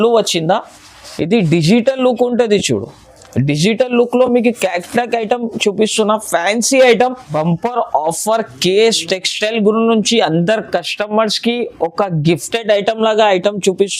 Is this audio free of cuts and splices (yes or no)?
no